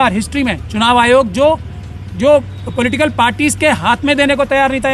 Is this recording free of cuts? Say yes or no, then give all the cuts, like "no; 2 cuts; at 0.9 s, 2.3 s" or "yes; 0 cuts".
yes; 0 cuts